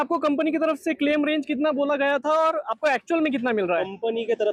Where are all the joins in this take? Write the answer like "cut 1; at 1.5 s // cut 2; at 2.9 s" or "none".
none